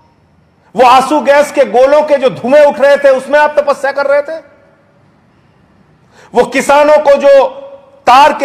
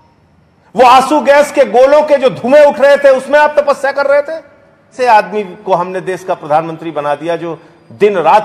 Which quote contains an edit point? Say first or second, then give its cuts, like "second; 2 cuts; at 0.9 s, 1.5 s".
second; 1 cut; at 4.9 s